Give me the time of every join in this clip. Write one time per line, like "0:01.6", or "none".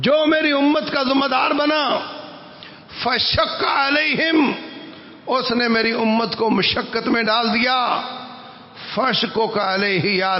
none